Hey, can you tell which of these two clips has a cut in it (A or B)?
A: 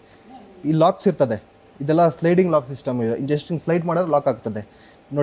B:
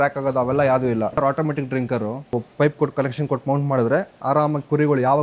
B